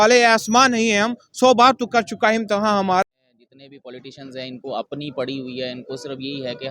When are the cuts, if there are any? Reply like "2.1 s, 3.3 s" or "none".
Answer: 3.0 s